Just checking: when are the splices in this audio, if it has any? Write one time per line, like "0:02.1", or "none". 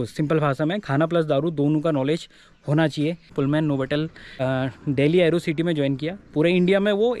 0:03.3
0:04.4